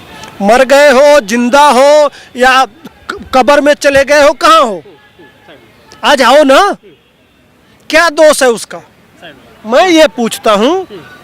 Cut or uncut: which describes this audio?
uncut